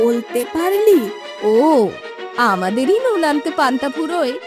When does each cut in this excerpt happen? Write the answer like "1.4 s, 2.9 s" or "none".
1.2 s